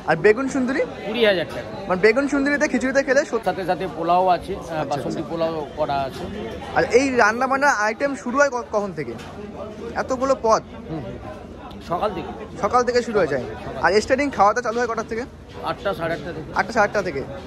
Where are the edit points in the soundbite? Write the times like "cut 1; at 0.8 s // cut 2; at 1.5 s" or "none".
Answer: none

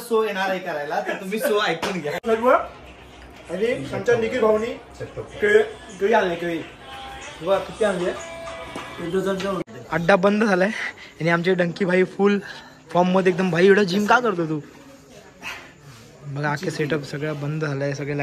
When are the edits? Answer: cut 1; at 2.2 s // cut 2; at 9.7 s

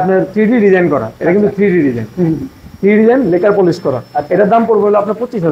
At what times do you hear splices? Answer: none

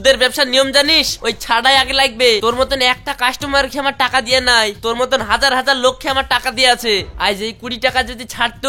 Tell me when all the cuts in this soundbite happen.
cut 1; at 2.4 s

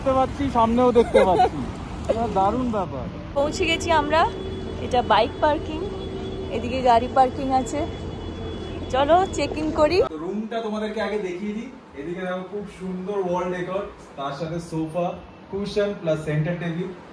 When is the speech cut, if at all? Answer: cut 1; at 3.2 s // cut 2; at 10.1 s

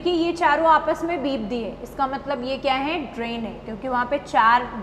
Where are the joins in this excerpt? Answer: none

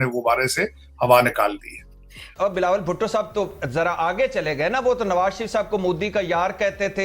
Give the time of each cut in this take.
cut 1; at 2.3 s

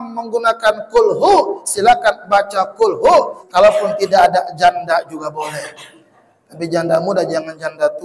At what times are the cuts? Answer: cut 1; at 3.4 s

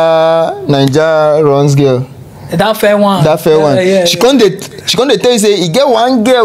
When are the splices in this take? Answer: none

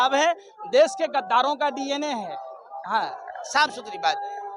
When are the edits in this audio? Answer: none

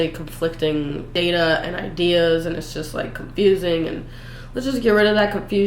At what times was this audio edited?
cut 1; at 1.1 s

